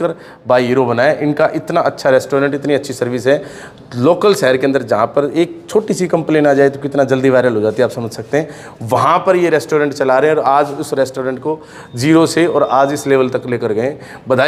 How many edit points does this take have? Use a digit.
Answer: 0